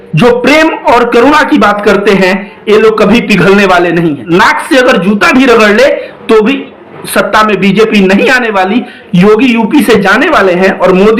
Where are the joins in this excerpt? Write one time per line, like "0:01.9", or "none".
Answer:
0:04.2